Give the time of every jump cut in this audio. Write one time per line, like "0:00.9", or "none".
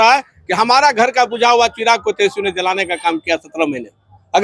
none